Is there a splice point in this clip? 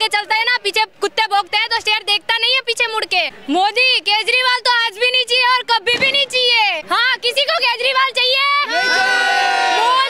yes; 2 cuts; at 3.4 s, 6.8 s

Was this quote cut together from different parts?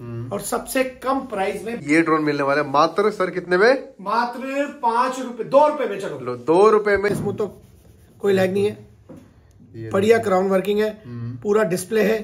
yes; 2 cuts; at 1.8 s, 7.1 s

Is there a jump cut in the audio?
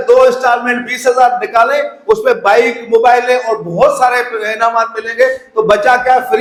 no; 0 cuts

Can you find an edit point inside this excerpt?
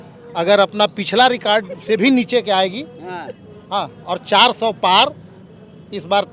no; 0 cuts

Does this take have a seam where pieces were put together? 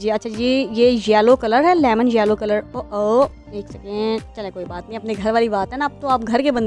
no; 0 cuts

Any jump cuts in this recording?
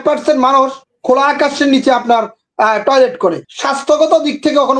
yes; 1 cut; at 3.5 s

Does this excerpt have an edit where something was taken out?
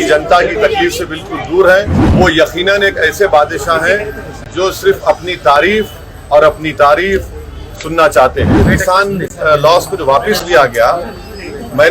yes; 2 cuts; at 2.0 s, 8.7 s

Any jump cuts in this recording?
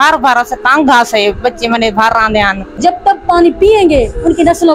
yes; 1 cut; at 2.8 s

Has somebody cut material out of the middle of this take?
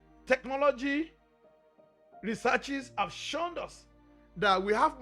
no; 0 cuts

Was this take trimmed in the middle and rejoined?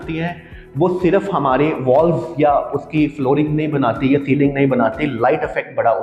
no; 0 cuts

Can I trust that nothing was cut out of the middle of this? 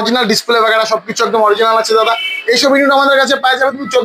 yes; 0 cuts

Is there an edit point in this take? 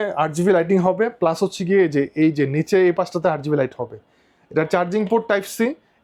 no; 0 cuts

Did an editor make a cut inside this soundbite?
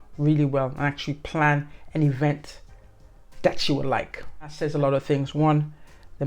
yes; 1 cut; at 4.6 s

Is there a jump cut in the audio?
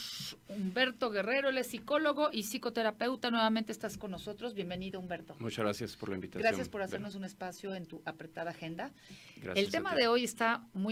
no; 0 cuts

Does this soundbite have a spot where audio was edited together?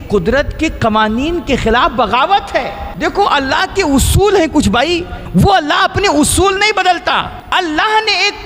yes; 3 cuts; at 2.8 s, 5.2 s, 7.4 s

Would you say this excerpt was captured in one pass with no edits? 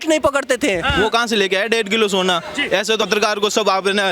no; 2 cuts; at 0.9 s, 3.1 s

